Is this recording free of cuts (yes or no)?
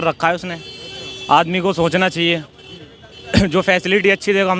yes